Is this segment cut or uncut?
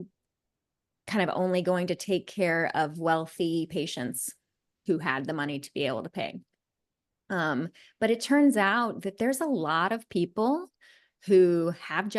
cut